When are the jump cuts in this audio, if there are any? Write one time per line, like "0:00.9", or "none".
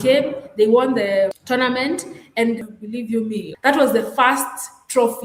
0:01.4